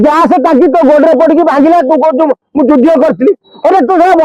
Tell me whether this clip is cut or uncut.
uncut